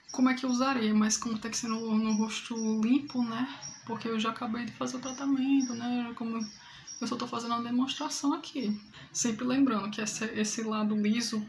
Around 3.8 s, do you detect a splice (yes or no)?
no